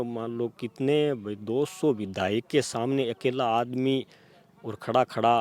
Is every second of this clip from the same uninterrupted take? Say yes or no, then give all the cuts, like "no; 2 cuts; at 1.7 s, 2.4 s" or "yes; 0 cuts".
yes; 0 cuts